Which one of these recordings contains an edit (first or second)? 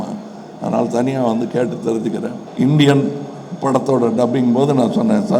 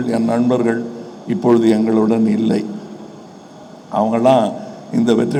first